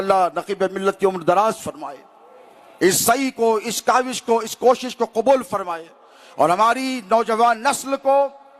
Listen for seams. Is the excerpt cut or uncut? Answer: uncut